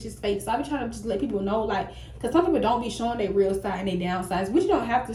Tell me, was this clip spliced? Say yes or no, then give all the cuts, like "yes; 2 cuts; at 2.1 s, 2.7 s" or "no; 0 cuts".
no; 0 cuts